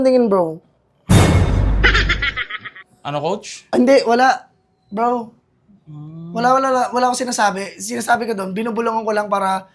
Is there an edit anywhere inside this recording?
no; 0 cuts

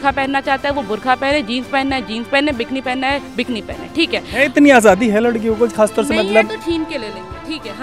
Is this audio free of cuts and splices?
yes; 0 cuts

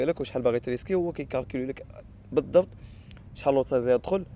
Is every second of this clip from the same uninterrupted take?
yes; 0 cuts

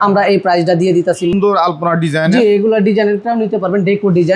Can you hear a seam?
yes; 1 cut; at 1.3 s

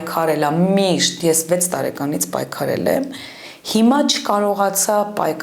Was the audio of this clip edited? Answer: no; 0 cuts

